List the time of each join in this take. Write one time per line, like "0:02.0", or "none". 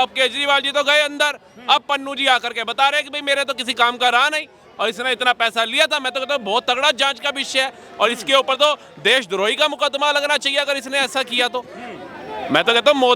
none

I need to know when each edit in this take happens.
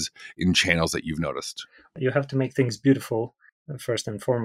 0:01.8

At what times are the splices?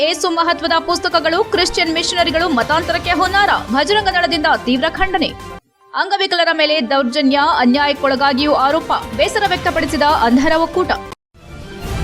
0:11.1

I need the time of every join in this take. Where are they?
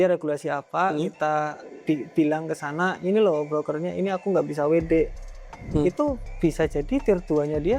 none

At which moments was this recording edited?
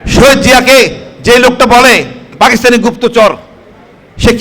0:02.2

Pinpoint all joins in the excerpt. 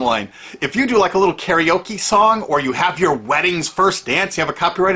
none

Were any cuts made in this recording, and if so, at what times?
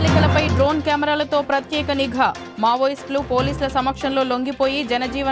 none

